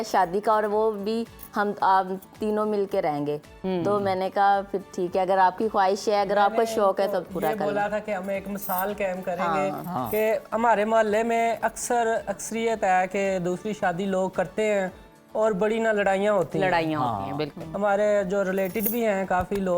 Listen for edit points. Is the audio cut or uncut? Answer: uncut